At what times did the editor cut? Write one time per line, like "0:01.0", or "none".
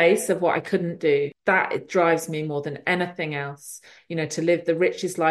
0:01.4